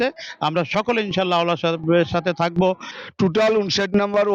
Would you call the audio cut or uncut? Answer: cut